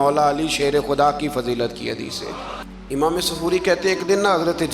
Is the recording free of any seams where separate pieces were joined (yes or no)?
no